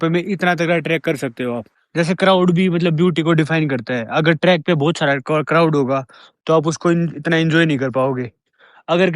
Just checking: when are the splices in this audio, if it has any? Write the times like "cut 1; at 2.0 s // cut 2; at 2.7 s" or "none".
cut 1; at 1.7 s

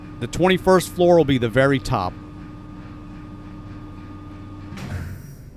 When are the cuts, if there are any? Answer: cut 1; at 2.7 s

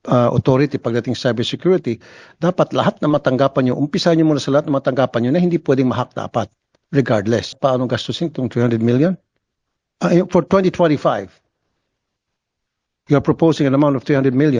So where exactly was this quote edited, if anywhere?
cut 1; at 7.5 s

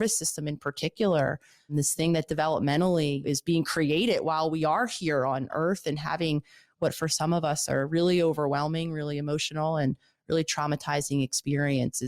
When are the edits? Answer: cut 1; at 1.7 s // cut 2; at 3.2 s // cut 3; at 5.5 s

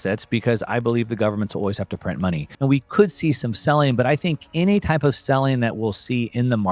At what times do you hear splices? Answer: cut 1; at 2.5 s

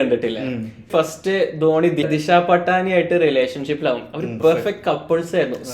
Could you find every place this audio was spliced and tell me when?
cut 1; at 0.9 s // cut 2; at 2.1 s // cut 3; at 4.3 s

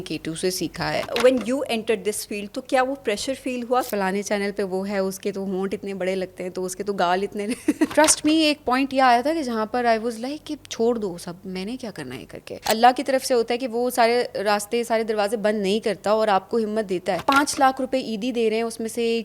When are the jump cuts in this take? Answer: cut 1; at 1.1 s // cut 2; at 3.9 s // cut 3; at 7.9 s // cut 4; at 12.6 s // cut 5; at 17.2 s

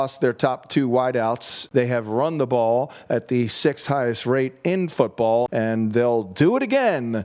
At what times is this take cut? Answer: cut 1; at 1.5 s // cut 2; at 5.5 s

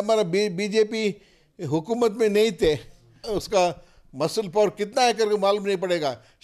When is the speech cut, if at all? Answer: cut 1; at 3.3 s

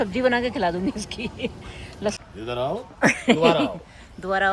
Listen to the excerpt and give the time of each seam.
cut 1; at 2.2 s

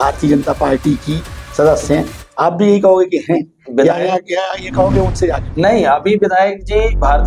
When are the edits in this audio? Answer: none

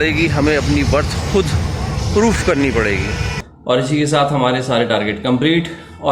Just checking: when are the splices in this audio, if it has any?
cut 1; at 3.5 s

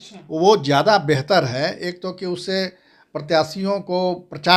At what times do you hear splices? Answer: none

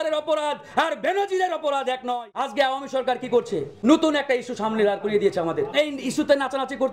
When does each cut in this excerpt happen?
cut 1; at 2.5 s // cut 2; at 3.7 s // cut 3; at 5.7 s

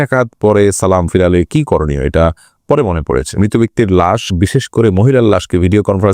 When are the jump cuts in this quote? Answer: cut 1; at 3.4 s

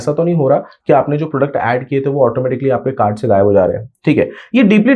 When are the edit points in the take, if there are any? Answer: none

